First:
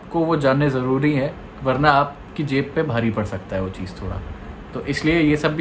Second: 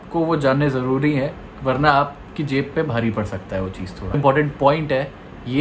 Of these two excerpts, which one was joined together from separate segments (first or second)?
second